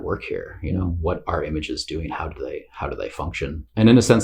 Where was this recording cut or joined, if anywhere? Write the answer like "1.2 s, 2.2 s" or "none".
none

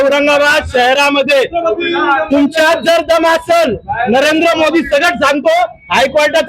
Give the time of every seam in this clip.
none

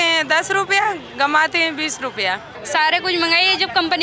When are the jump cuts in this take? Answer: 2.5 s

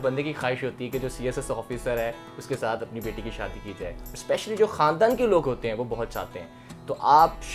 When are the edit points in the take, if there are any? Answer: none

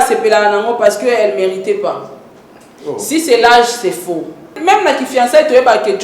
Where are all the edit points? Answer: 4.5 s

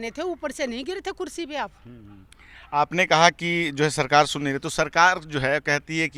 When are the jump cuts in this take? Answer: none

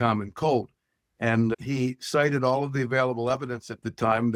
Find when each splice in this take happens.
none

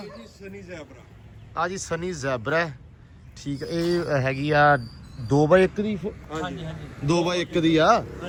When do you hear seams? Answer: none

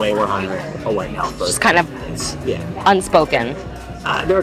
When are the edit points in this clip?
none

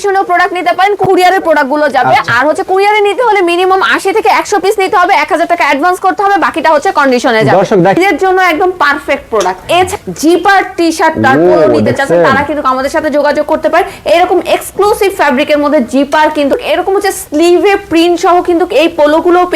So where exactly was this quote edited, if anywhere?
1.0 s, 8.0 s, 9.9 s, 16.6 s

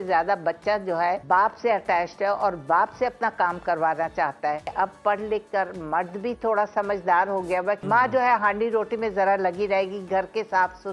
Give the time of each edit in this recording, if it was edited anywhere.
1.2 s, 4.7 s, 7.8 s

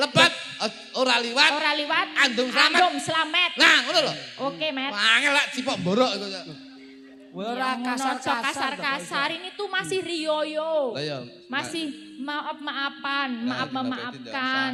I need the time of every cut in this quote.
none

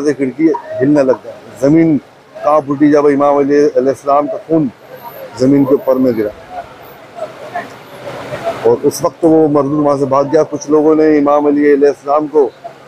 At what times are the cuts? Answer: none

